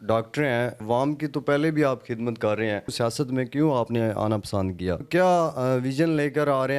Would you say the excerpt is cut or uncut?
cut